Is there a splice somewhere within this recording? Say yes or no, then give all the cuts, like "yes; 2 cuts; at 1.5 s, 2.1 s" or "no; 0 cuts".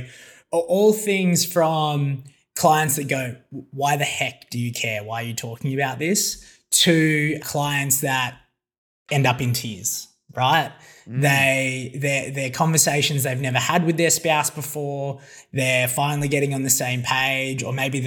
no; 0 cuts